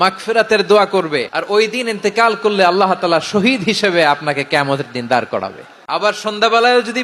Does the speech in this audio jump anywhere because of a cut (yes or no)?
yes